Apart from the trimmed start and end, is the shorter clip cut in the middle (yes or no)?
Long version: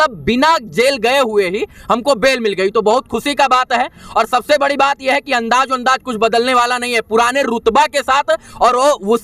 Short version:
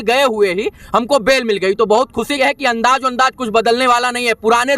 yes